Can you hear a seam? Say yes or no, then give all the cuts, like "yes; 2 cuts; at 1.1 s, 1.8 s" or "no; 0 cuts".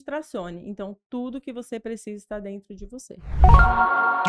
yes; 1 cut; at 3.2 s